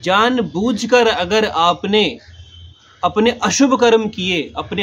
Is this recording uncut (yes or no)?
yes